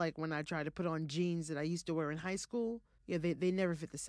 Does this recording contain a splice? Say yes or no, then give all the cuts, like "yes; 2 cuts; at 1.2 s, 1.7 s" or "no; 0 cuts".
yes; 1 cut; at 2.9 s